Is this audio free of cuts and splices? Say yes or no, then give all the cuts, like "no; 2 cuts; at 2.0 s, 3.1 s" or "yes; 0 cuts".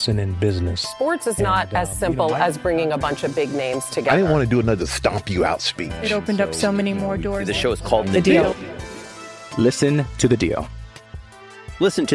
yes; 0 cuts